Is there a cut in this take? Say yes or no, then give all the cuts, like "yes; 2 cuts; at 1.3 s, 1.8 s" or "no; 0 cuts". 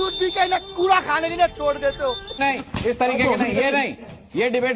yes; 1 cut; at 2.4 s